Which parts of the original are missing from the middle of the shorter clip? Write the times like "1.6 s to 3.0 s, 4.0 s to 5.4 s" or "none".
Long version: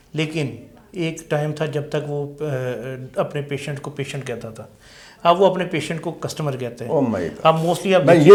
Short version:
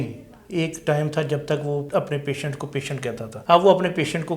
2.3 s to 3.1 s, 4.5 s to 5.1 s